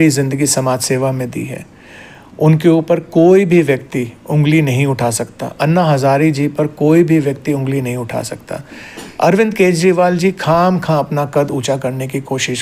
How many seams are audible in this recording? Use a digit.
0